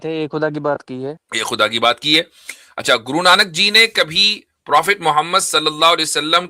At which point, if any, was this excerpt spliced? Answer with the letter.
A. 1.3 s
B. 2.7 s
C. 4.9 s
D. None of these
A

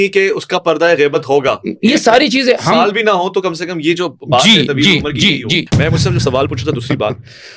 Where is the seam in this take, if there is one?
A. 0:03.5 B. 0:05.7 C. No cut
B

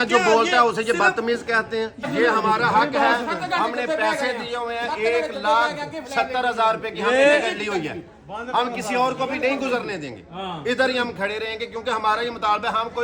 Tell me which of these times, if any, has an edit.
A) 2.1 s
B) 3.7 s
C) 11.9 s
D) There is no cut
A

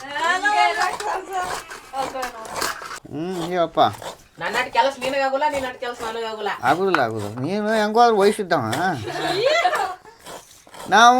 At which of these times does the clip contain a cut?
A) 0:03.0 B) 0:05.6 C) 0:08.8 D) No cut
A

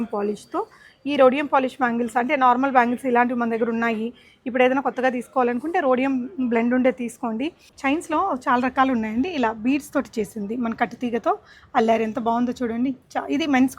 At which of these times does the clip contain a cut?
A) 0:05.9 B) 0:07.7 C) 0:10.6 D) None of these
B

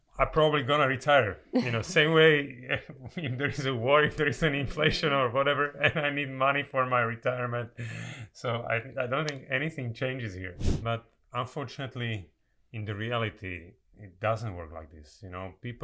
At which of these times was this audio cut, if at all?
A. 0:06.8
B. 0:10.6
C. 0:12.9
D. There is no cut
B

